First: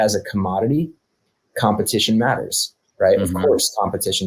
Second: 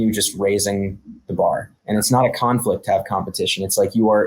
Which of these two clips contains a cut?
second; 1 cut; at 1.7 s

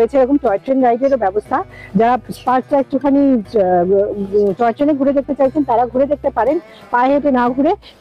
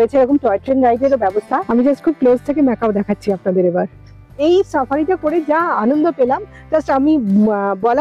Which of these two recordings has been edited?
second; 2 cuts; at 1.6 s, 4.4 s

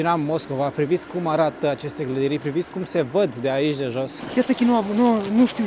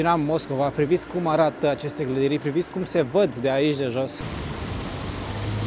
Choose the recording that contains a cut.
first; 1 cut; at 4.2 s

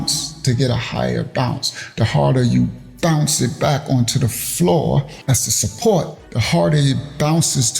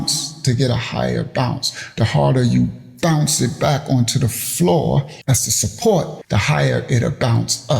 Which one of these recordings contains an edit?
second; 1 cut; at 6.2 s

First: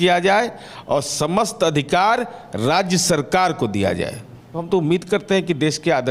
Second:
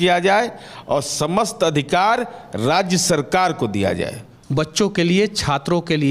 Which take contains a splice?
second; 1 cut; at 4.4 s

